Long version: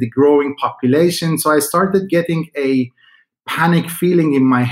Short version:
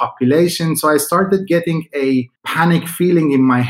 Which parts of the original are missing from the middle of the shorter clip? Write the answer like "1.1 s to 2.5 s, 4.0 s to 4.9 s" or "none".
3.0 s to 3.4 s